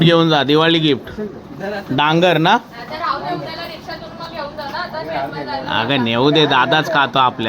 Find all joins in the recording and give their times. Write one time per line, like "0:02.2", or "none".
none

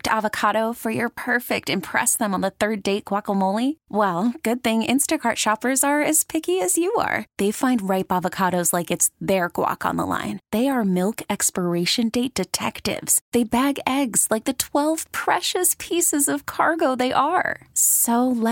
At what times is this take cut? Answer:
none

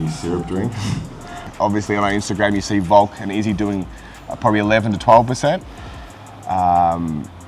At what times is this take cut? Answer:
0:01.5

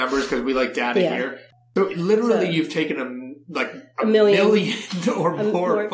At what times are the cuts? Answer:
0:01.4

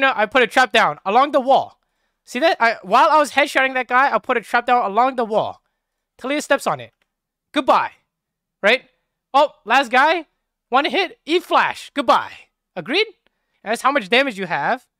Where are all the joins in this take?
0:13.5

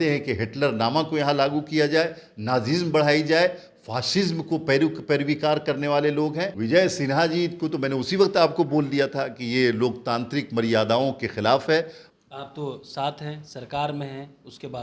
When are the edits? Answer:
0:06.5
0:12.0

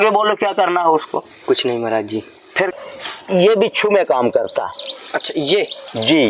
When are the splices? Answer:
0:02.8

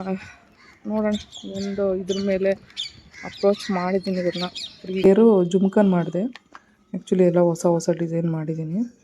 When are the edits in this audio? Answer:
0:05.0

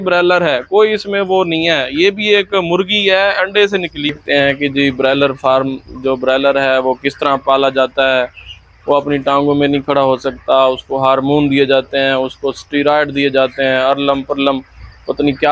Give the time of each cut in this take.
0:04.1

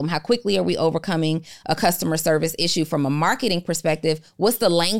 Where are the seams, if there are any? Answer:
none

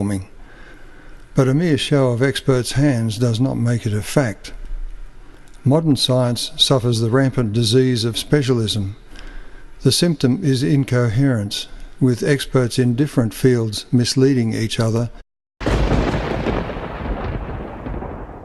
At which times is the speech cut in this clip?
none

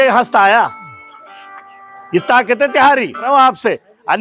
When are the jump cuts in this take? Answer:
0:03.2

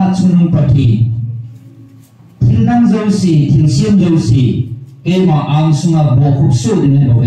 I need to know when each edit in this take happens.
none

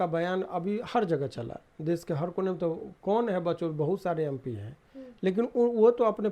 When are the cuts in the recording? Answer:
none

